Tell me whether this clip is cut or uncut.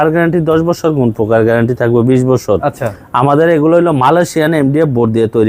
uncut